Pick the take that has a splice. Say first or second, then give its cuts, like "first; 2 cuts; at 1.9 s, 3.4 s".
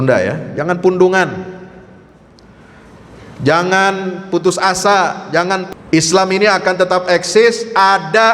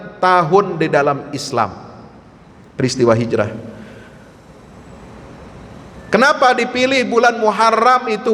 first; 1 cut; at 5.6 s